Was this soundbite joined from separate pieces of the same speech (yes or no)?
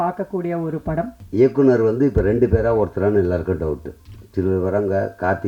yes